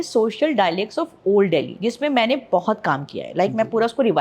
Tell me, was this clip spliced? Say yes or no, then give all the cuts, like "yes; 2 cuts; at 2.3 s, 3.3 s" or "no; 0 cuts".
no; 0 cuts